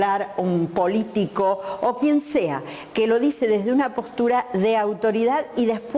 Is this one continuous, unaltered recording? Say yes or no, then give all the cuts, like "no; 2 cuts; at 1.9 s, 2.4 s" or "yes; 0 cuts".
yes; 0 cuts